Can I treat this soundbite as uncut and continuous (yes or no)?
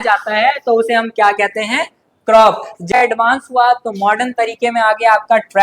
no